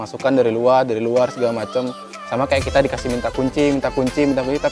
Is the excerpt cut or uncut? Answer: uncut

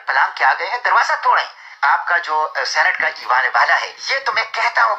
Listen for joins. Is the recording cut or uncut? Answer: cut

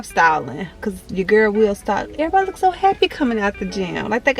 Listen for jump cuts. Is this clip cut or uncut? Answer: uncut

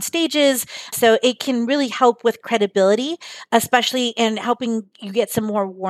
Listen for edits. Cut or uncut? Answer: uncut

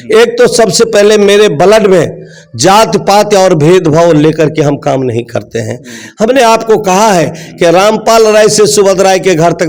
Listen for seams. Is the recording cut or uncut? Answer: uncut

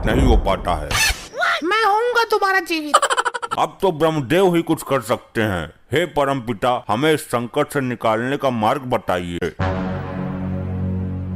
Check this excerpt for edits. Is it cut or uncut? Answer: cut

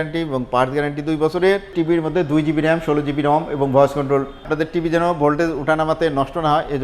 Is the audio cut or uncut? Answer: cut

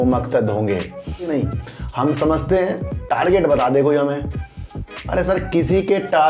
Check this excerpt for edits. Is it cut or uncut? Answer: cut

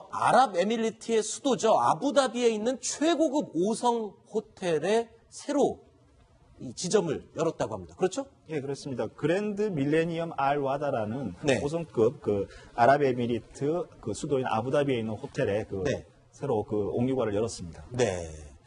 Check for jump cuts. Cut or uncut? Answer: cut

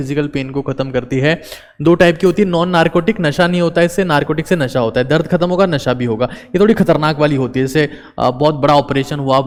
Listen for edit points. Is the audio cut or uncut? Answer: uncut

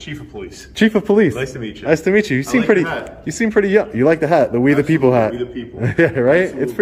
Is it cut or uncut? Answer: uncut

